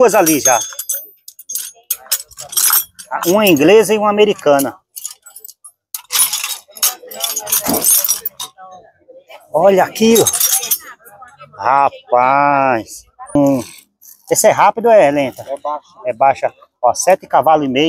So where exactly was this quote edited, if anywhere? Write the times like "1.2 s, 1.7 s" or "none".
13.4 s